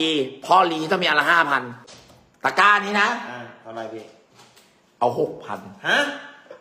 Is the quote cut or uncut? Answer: cut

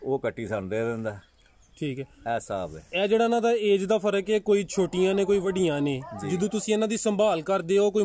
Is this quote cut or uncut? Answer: uncut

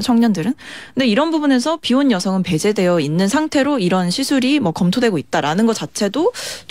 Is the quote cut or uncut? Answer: uncut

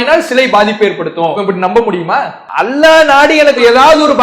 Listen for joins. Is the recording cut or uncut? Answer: cut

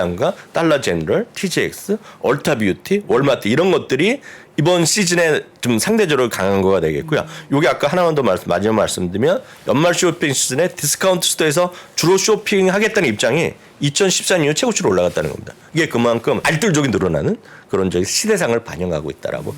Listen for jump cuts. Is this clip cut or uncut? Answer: cut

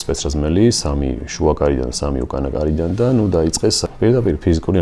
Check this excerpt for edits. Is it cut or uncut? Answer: cut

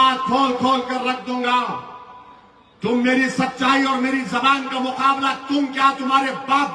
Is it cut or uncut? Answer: uncut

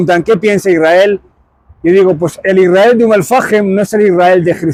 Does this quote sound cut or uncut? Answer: uncut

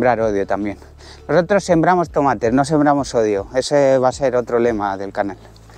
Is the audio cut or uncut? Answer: uncut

